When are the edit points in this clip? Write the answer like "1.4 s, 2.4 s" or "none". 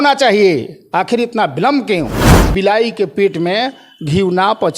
2.5 s